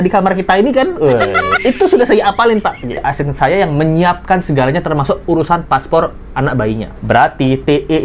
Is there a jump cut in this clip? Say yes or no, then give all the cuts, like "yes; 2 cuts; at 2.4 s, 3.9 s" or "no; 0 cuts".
yes; 1 cut; at 3.0 s